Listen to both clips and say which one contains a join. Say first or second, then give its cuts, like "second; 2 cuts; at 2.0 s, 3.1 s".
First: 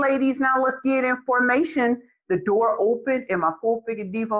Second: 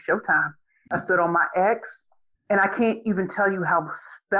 second; 1 cut; at 0.9 s